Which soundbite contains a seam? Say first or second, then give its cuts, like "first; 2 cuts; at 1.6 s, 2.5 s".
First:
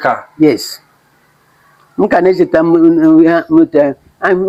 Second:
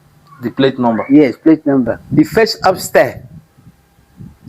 second; 1 cut; at 2.0 s